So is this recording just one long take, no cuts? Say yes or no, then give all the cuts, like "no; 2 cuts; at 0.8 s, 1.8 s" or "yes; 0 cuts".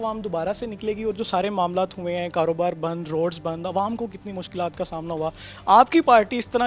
yes; 0 cuts